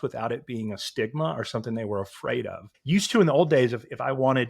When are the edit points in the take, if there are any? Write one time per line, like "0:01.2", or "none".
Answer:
0:02.7